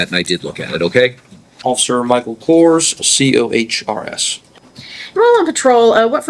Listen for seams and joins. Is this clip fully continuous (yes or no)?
yes